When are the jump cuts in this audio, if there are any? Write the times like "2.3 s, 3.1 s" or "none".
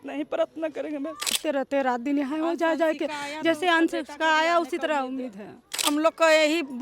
1.3 s, 5.8 s